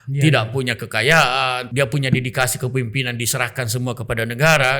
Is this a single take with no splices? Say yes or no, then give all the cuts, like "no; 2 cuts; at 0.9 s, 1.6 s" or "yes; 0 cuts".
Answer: no; 1 cut; at 1.6 s